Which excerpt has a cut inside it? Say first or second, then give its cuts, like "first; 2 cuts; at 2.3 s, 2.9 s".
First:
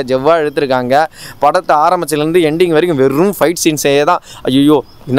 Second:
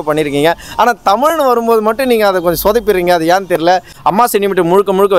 second; 1 cut; at 3.9 s